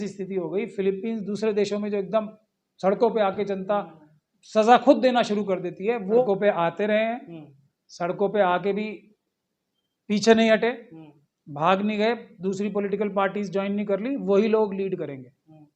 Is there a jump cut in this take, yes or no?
yes